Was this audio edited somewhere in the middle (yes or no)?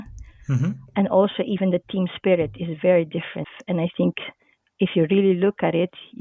yes